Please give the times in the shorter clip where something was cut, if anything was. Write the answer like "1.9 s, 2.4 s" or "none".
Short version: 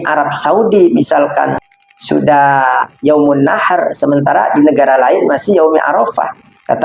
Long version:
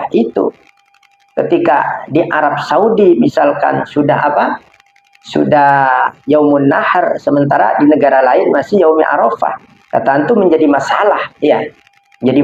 1.6 s